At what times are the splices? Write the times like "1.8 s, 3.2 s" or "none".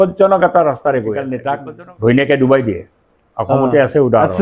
1.4 s